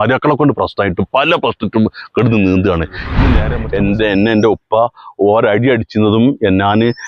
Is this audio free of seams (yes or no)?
no